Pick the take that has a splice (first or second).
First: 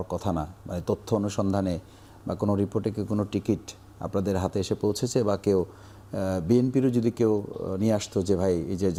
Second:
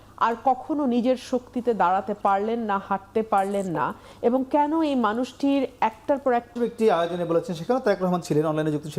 second